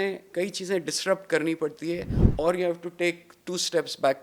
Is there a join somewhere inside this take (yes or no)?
no